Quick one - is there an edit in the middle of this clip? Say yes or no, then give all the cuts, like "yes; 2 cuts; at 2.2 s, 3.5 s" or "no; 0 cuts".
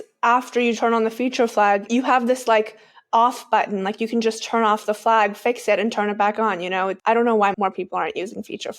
yes; 3 cuts; at 1.9 s, 7.0 s, 7.5 s